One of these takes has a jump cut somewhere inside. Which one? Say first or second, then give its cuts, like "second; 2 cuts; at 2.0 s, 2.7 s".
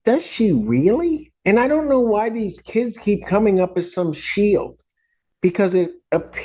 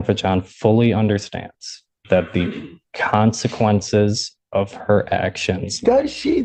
first; 1 cut; at 1.3 s